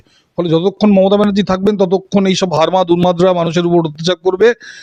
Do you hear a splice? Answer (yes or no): no